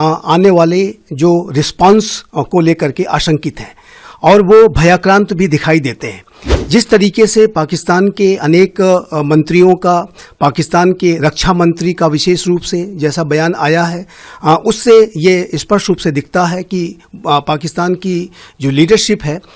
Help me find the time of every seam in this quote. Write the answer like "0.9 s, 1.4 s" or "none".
none